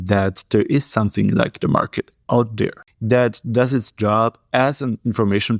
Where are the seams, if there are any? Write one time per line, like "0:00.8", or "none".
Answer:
0:02.9